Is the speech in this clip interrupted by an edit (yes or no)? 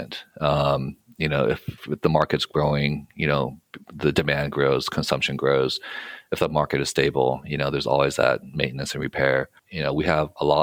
no